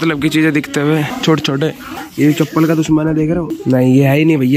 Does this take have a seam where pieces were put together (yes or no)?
yes